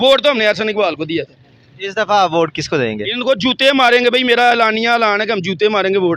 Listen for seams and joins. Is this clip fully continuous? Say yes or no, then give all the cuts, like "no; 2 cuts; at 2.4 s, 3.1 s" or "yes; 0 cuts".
yes; 0 cuts